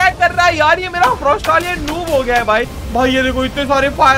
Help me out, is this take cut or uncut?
cut